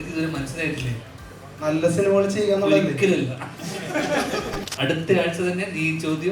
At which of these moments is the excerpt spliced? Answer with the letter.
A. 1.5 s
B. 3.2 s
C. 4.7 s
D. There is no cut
C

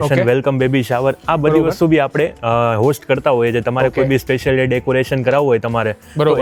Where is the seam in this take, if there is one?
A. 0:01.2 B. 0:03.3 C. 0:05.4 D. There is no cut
D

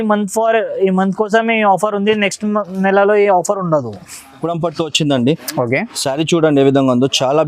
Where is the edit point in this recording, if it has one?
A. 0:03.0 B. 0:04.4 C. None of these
B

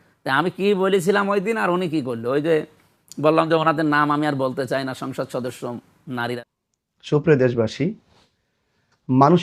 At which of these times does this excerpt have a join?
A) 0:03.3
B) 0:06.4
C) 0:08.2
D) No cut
B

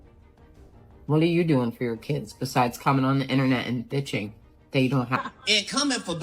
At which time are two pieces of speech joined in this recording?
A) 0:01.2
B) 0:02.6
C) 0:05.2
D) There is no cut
C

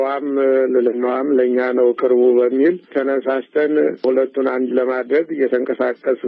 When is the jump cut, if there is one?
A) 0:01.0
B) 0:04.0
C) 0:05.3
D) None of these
B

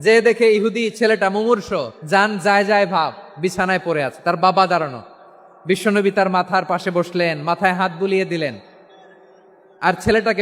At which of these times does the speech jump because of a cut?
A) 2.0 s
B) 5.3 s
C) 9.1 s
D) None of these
A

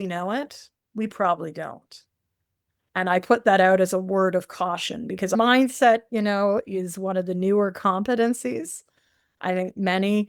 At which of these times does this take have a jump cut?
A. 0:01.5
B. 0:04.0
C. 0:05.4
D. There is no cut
C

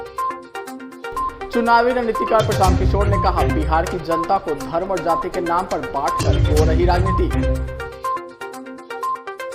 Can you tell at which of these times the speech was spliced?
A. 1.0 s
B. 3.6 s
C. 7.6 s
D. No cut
A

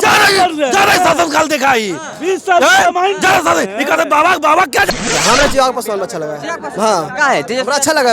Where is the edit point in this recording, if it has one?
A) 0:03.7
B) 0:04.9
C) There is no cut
B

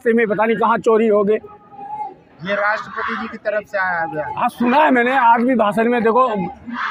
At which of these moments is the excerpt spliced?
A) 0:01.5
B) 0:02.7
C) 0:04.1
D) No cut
D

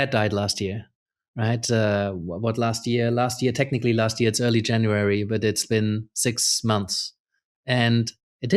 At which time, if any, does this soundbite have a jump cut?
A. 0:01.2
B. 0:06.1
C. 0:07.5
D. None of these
D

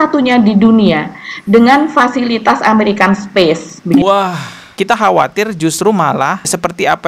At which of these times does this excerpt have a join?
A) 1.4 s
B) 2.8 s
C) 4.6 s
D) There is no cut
C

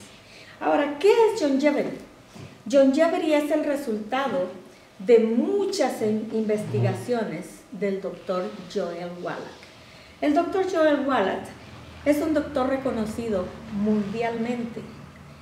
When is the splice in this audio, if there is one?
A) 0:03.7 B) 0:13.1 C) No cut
A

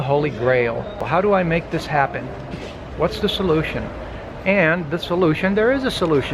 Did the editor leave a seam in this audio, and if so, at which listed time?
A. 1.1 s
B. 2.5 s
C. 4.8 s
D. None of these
A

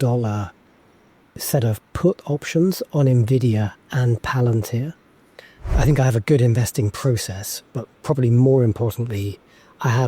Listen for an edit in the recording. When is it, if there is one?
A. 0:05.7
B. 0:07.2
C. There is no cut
A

